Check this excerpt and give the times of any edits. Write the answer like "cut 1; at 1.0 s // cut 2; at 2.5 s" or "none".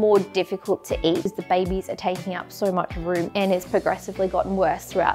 cut 1; at 1.4 s // cut 2; at 3.3 s